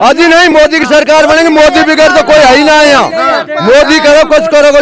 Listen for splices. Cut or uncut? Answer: uncut